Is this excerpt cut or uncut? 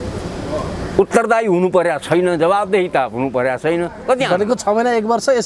uncut